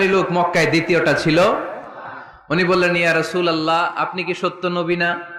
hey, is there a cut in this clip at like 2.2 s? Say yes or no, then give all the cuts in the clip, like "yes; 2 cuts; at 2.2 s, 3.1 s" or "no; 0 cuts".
no; 0 cuts